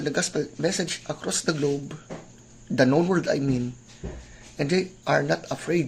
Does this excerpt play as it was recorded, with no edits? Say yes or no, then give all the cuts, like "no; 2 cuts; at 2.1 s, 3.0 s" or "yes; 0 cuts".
no; 1 cut; at 3.4 s